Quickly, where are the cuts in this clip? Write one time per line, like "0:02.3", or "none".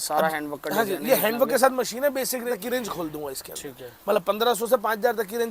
0:02.5